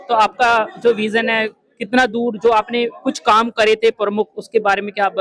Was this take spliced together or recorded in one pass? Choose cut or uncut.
uncut